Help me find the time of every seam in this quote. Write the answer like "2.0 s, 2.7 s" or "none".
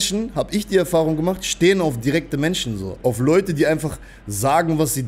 2.9 s